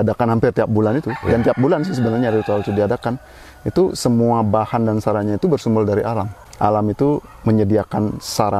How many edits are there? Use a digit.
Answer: 1